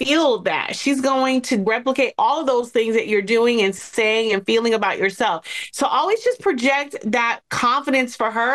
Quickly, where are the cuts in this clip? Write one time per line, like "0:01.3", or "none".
0:01.6